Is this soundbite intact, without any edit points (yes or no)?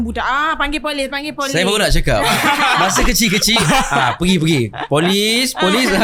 yes